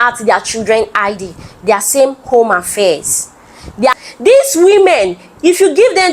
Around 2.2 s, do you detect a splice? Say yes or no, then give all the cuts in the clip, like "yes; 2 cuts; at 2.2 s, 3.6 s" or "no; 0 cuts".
no; 1 cut; at 4.0 s